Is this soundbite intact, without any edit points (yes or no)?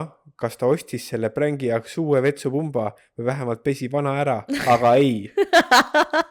yes